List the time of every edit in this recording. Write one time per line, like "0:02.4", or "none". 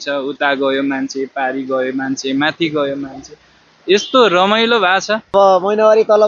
0:05.3